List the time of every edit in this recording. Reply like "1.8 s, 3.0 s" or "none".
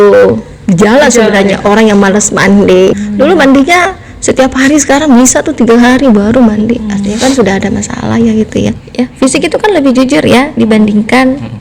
3.0 s, 8.8 s

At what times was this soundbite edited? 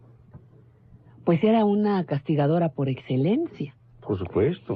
3.5 s

